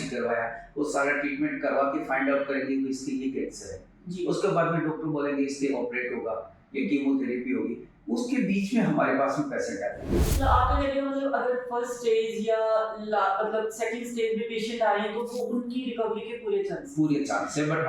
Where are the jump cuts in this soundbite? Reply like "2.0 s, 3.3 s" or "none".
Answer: 10.1 s